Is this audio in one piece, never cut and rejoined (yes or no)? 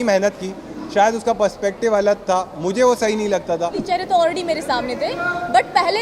no